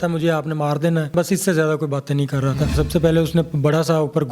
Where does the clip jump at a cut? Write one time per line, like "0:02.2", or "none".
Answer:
0:01.1
0:02.7